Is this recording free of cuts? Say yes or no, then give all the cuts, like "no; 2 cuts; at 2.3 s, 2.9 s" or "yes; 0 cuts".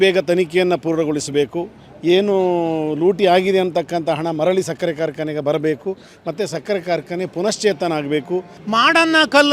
no; 1 cut; at 8.5 s